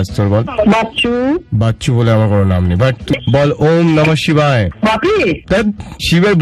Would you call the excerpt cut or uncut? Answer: cut